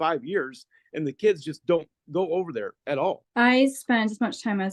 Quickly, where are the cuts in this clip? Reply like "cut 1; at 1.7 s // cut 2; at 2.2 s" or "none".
cut 1; at 3.2 s